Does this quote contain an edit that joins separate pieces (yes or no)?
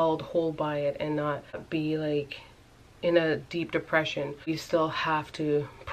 yes